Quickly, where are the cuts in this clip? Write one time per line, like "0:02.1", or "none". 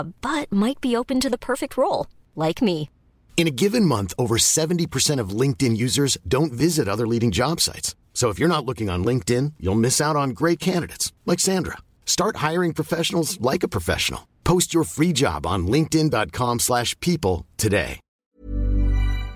0:18.0